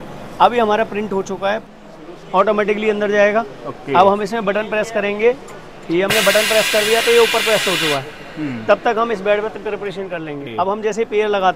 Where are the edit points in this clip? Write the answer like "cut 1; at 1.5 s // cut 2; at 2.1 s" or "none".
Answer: cut 1; at 1.6 s // cut 2; at 10.4 s